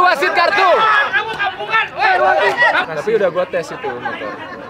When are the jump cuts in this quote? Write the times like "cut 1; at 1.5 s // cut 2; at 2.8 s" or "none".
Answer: cut 1; at 2.8 s

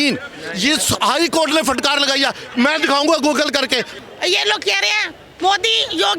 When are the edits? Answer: cut 1; at 3.9 s

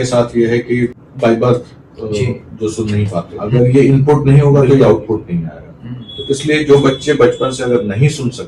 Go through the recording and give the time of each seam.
cut 1; at 1.0 s // cut 2; at 3.3 s

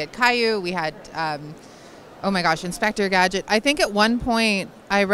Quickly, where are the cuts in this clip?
none

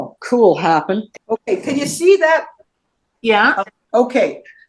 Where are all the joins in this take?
cut 1; at 1.1 s // cut 2; at 2.6 s // cut 3; at 3.8 s

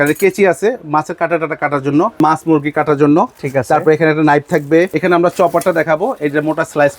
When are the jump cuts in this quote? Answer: cut 1; at 2.2 s // cut 2; at 4.9 s

